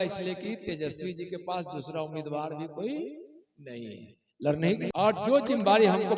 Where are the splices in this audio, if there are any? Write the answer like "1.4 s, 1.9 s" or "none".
4.9 s